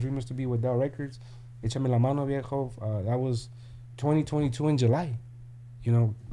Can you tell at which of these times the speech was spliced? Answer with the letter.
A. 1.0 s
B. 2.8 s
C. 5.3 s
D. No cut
D